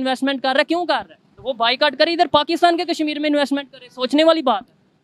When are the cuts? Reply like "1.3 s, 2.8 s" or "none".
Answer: none